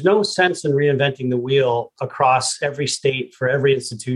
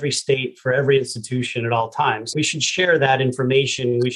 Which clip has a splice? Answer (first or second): second